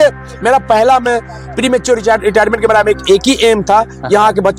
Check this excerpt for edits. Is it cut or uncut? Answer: uncut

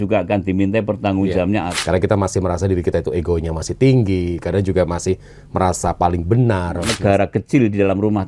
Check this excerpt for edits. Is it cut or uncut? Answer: cut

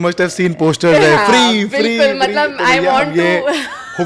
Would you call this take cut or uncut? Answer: uncut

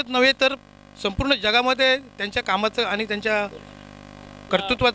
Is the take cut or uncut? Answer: uncut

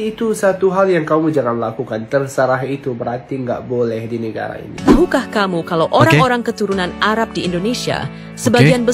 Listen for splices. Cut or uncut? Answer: cut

